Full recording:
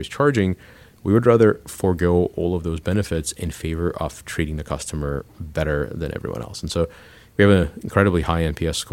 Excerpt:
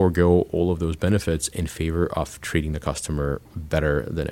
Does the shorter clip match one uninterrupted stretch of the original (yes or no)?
yes